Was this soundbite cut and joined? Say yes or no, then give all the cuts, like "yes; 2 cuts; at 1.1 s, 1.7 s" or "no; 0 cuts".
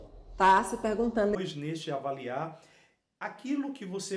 yes; 1 cut; at 1.3 s